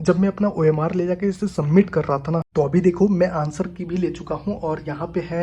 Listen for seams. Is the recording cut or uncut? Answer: cut